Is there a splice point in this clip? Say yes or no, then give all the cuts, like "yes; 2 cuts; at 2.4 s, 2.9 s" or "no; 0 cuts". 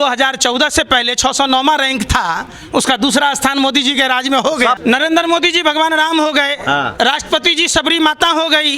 yes; 1 cut; at 4.8 s